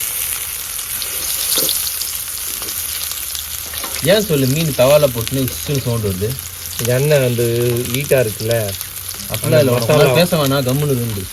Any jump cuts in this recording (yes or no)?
no